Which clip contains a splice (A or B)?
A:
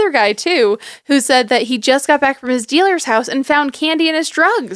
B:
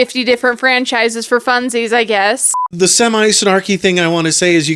B